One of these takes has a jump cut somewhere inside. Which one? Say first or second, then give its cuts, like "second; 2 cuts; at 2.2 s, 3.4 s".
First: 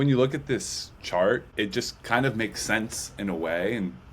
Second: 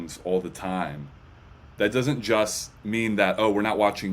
first; 1 cut; at 1.5 s